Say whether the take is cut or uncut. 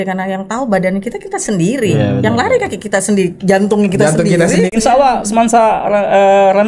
cut